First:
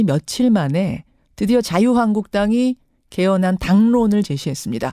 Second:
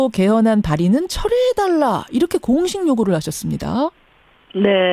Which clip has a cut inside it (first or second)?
second